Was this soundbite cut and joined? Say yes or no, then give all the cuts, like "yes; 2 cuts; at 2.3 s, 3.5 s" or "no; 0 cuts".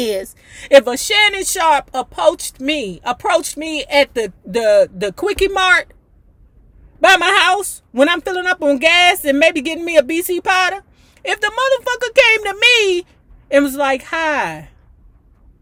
no; 0 cuts